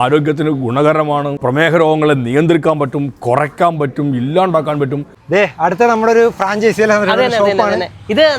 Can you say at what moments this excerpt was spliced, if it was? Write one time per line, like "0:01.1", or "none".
0:01.4
0:05.1